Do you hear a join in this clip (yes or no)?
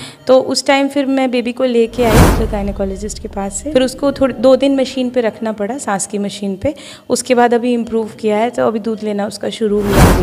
yes